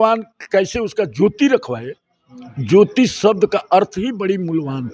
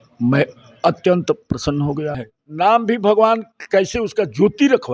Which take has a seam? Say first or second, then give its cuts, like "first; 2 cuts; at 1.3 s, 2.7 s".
second; 1 cut; at 2.2 s